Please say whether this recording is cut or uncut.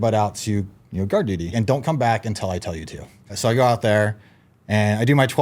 cut